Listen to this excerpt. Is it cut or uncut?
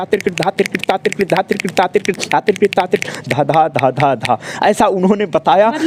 uncut